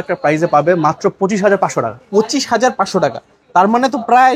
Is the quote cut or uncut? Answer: uncut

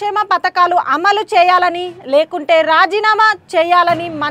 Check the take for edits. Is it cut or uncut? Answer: uncut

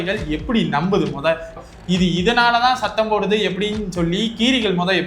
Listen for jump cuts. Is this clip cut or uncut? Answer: cut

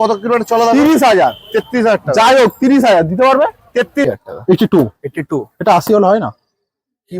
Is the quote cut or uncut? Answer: cut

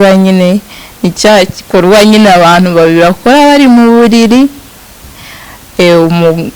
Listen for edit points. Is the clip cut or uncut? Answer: uncut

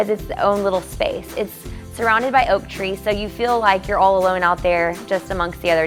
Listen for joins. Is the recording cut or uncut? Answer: uncut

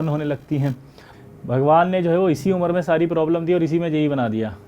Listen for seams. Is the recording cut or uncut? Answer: cut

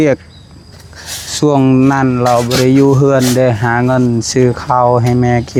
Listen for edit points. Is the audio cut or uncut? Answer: uncut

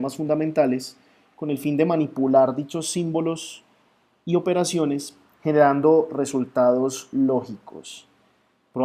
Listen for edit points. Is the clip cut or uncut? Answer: uncut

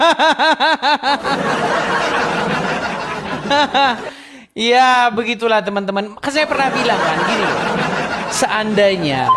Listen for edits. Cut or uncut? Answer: uncut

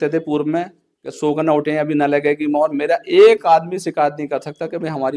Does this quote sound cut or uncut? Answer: uncut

